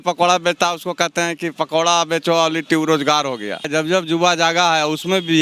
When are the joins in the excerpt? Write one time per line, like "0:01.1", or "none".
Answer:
0:03.7